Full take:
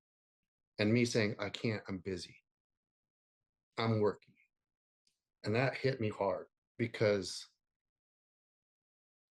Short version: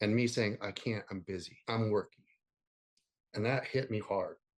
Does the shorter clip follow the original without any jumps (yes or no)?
no